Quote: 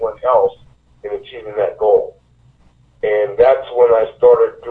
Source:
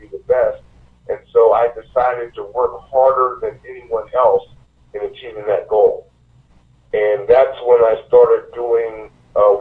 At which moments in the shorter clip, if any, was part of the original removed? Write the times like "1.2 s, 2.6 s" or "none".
none